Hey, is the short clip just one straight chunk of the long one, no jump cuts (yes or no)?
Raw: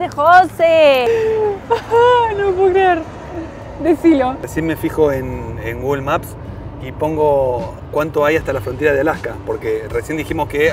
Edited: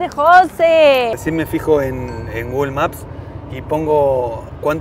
no